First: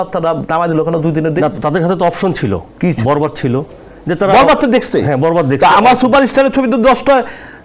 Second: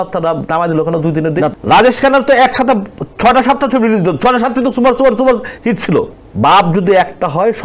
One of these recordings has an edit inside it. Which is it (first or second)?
second